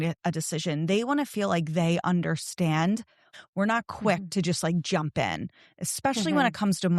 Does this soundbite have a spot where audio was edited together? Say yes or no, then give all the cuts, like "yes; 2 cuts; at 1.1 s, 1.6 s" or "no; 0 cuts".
yes; 1 cut; at 3.3 s